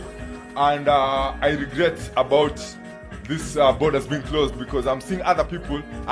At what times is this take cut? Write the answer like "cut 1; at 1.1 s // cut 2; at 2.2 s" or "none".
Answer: none